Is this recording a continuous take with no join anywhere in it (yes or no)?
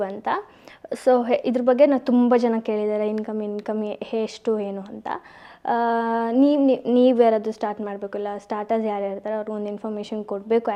yes